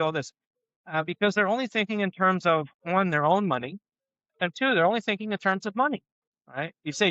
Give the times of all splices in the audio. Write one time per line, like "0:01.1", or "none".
none